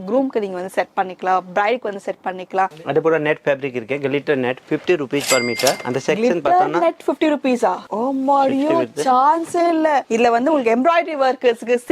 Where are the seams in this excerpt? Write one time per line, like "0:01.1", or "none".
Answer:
0:02.7
0:07.9
0:10.1